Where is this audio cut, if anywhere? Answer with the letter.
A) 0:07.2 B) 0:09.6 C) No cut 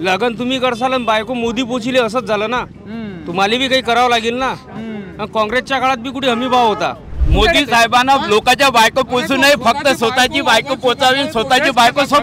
A